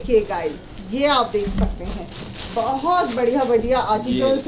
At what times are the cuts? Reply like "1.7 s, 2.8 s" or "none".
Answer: none